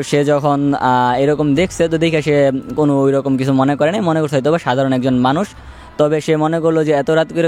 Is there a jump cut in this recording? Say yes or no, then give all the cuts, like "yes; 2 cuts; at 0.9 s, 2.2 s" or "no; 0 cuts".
no; 0 cuts